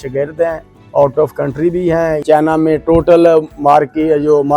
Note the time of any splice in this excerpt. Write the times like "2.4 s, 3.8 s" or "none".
2.2 s